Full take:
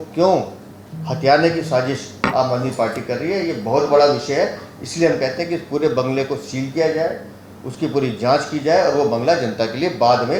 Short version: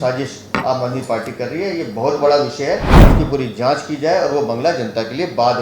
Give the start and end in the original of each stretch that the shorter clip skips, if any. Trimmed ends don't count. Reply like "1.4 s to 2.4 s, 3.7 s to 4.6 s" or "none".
4.7 s to 7.6 s